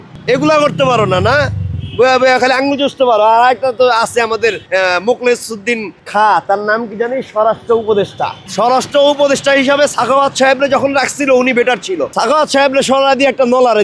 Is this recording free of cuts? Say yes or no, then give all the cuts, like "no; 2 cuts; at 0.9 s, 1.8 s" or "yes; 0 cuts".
yes; 0 cuts